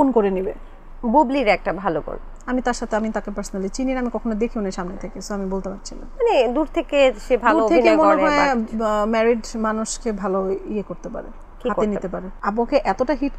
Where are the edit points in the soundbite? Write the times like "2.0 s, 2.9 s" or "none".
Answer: 12.3 s